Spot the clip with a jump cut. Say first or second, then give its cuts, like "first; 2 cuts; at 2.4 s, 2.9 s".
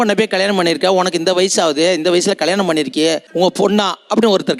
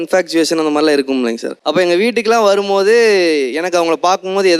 second; 1 cut; at 1.6 s